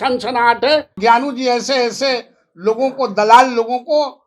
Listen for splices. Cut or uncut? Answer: cut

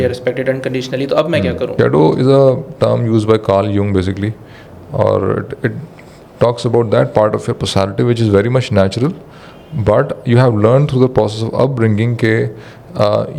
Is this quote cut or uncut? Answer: cut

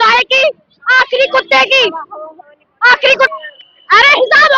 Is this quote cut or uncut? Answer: cut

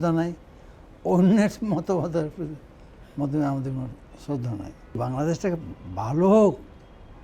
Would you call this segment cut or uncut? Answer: cut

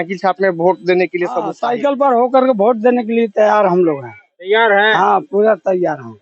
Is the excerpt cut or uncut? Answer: cut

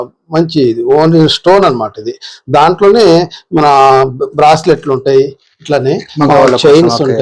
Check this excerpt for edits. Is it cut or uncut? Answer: uncut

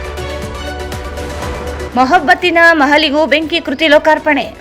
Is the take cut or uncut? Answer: cut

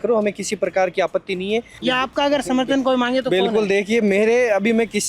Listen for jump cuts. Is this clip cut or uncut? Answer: cut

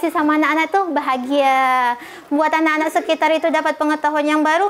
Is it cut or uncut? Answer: uncut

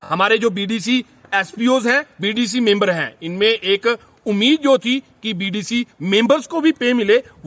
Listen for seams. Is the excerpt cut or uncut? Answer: uncut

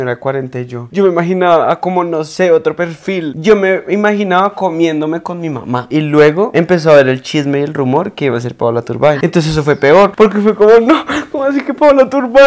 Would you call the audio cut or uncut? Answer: uncut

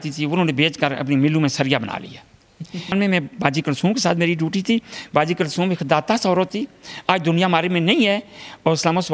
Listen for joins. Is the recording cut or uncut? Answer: cut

